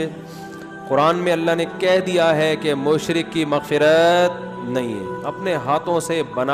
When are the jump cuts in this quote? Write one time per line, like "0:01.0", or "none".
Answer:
none